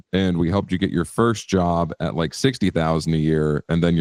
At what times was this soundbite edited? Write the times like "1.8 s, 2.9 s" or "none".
none